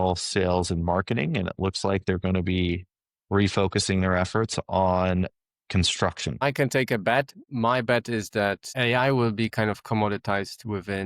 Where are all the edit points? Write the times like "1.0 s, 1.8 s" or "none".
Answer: 6.4 s, 7.4 s, 8.7 s